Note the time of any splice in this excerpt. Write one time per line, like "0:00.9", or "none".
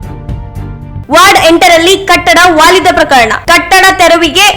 0:01.0